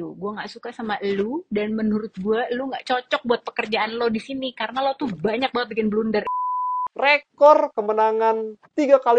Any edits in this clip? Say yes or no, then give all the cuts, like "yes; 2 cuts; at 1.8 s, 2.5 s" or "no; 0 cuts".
yes; 1 cut; at 6.5 s